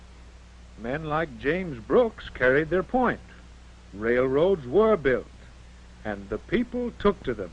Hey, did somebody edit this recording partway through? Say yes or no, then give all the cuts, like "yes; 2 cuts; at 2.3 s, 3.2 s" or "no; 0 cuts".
yes; 1 cut; at 2.3 s